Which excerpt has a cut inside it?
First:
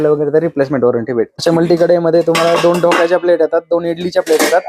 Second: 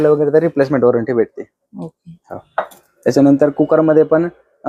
first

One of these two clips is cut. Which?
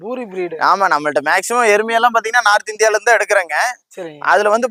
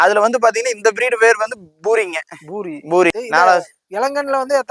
second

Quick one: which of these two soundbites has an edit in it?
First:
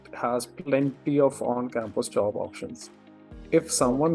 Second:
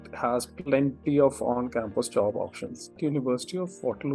second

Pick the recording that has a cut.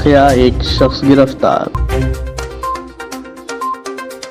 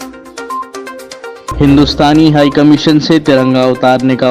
second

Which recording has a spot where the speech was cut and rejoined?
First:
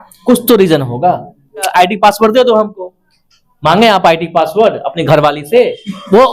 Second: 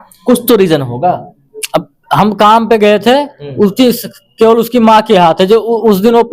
first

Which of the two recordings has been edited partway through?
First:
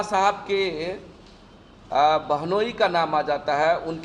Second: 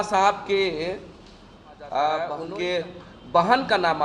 second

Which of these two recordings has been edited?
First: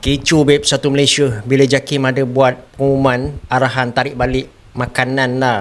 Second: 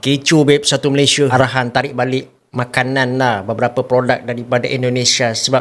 second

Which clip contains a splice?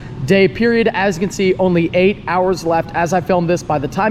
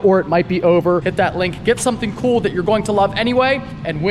second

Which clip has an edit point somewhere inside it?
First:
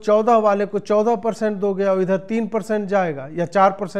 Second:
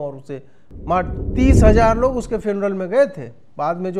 second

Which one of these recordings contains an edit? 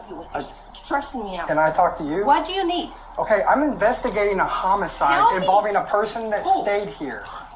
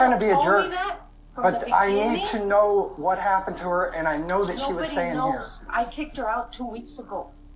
first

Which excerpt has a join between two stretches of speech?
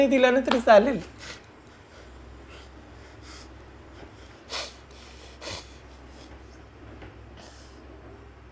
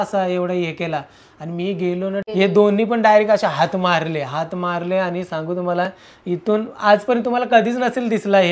second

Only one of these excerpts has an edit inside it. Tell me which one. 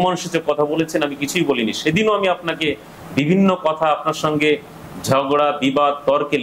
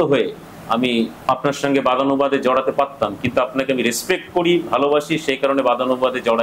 second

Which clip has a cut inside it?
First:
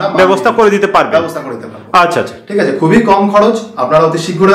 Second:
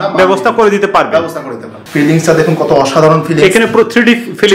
second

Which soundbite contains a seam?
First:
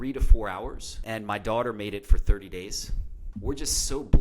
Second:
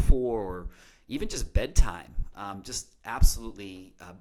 first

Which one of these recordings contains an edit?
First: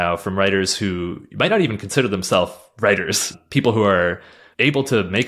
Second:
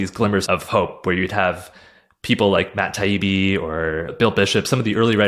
first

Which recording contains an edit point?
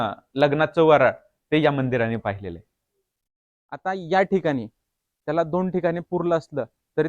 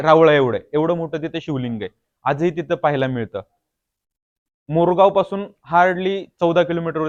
first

